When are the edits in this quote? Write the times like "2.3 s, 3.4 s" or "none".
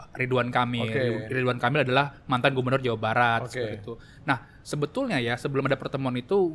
none